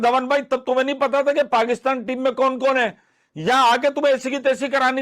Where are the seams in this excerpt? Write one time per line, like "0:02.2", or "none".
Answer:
none